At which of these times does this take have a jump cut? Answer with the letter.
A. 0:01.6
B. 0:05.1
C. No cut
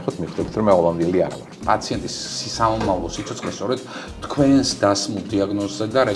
A